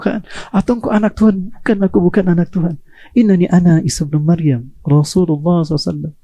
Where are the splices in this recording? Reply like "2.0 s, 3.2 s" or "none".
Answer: none